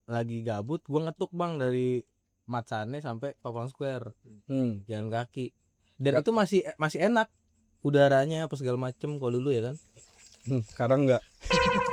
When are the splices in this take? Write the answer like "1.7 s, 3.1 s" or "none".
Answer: none